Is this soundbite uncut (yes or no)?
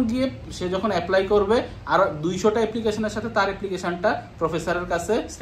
yes